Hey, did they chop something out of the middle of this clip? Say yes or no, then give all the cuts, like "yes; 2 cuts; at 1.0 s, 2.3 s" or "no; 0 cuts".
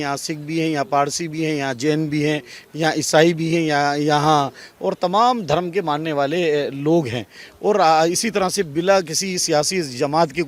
no; 0 cuts